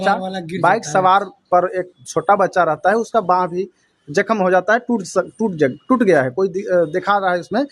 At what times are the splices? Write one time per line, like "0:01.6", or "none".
none

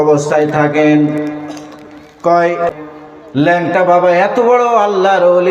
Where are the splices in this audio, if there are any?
0:02.7

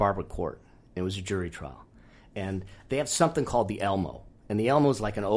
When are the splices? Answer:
none

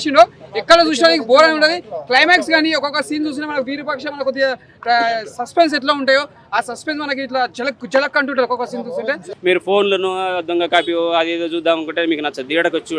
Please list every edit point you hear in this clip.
0:09.3

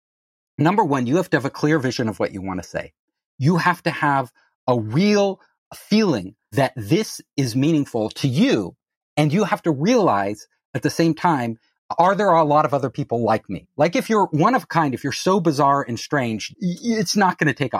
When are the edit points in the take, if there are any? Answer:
0:05.6
0:06.5
0:16.4

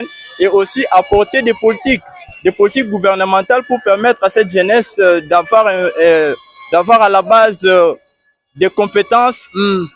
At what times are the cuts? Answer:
none

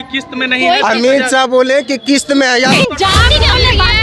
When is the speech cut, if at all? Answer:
0:02.7

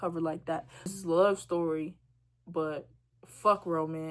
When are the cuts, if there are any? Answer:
0:00.9

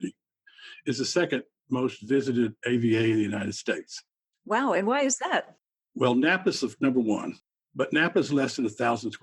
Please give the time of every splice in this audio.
0:07.3

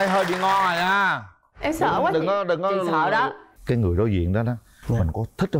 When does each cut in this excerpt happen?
0:03.5

